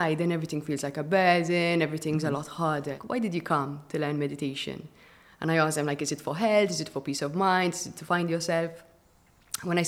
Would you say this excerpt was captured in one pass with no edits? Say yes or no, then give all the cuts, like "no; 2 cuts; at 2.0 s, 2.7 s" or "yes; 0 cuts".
no; 1 cut; at 3.0 s